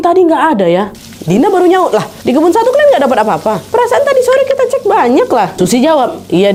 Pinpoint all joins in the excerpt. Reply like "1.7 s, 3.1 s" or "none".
none